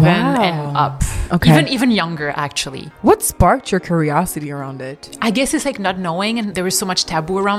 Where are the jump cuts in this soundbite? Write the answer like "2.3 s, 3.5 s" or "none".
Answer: 6.5 s